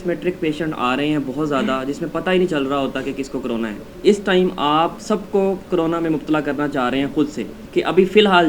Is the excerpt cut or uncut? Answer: cut